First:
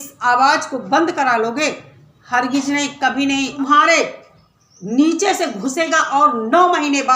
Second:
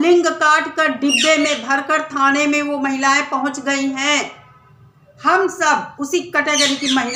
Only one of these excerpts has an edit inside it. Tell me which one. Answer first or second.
first